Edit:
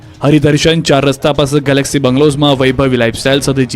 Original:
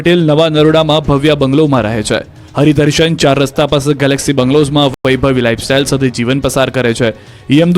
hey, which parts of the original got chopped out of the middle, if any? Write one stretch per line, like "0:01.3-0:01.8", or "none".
0:04.9-0:05.0